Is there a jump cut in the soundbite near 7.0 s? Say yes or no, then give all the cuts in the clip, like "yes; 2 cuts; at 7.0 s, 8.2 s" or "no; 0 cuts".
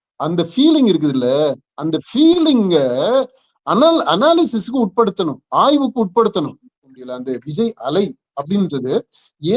yes; 1 cut; at 7.0 s